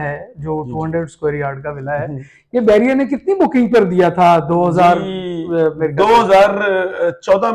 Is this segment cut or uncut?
uncut